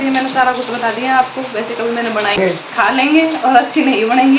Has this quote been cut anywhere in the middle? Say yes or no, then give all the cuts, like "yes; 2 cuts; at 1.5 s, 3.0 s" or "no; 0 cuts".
yes; 1 cut; at 2.4 s